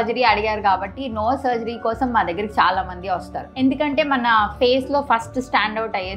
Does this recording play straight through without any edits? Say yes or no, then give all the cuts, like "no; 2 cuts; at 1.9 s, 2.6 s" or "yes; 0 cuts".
no; 1 cut; at 3.5 s